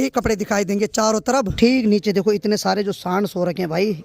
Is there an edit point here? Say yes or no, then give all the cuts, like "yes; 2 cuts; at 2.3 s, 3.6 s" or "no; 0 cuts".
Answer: yes; 1 cut; at 1.5 s